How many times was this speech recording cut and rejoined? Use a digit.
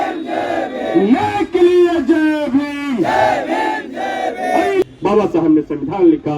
1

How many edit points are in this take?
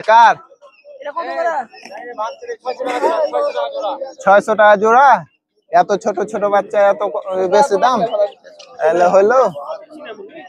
0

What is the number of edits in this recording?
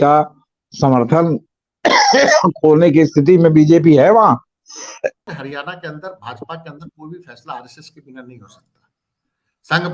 1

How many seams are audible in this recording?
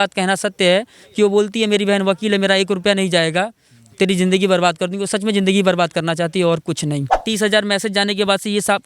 1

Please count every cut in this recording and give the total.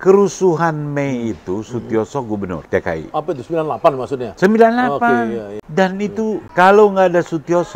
3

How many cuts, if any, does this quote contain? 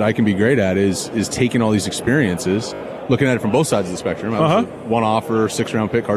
0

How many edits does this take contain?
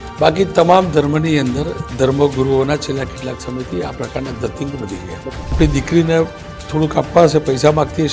1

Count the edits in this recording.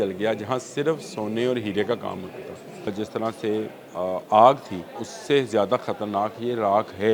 2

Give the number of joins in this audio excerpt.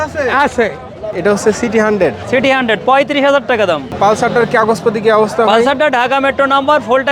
2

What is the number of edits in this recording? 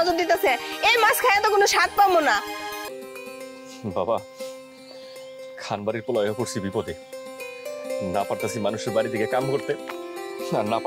1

